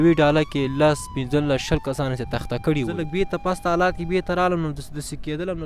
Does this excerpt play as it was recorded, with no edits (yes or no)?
no